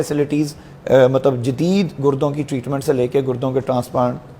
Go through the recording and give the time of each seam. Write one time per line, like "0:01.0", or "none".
none